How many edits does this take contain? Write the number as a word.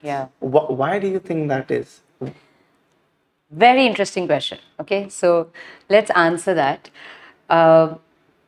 zero